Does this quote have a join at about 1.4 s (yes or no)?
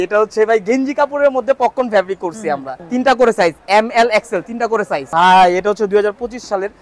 no